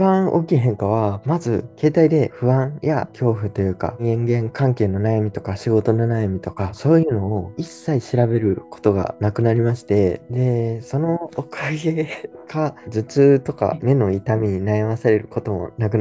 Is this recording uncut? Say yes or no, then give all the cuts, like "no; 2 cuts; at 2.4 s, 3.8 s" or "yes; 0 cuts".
yes; 0 cuts